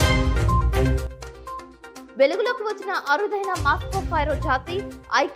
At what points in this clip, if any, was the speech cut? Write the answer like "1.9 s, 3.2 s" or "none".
1.1 s, 1.8 s